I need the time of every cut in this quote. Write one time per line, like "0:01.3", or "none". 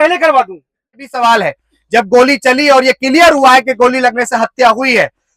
0:01.1